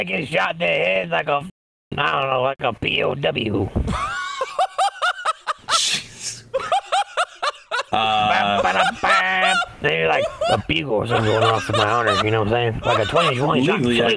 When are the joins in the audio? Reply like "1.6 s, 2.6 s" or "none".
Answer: none